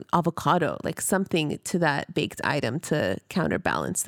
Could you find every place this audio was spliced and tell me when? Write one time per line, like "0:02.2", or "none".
none